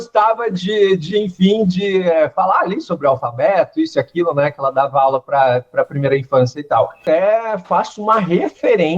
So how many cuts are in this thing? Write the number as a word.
one